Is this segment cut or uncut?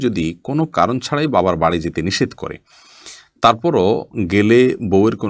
uncut